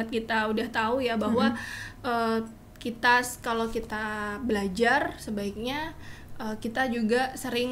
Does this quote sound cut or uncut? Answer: uncut